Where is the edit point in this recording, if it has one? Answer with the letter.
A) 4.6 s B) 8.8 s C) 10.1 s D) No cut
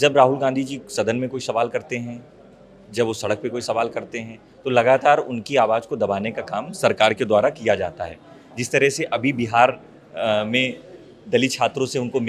D